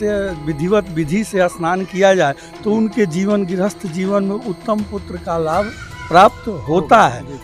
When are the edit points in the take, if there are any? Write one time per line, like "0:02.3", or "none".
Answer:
none